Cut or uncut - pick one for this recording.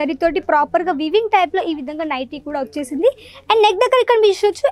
uncut